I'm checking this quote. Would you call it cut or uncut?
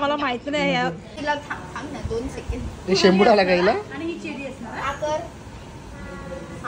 cut